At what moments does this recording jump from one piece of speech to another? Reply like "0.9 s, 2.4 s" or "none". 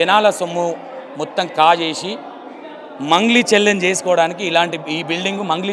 none